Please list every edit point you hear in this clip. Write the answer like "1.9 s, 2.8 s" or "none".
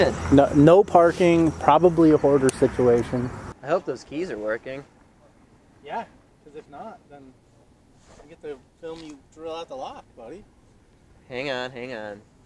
none